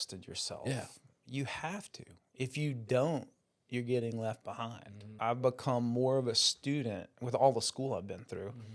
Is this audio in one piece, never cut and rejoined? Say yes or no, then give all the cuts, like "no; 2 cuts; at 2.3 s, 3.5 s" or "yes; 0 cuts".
no; 1 cut; at 5.2 s